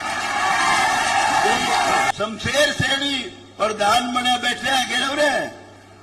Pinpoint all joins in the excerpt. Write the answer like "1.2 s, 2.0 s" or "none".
2.1 s